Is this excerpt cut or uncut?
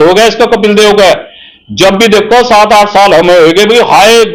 uncut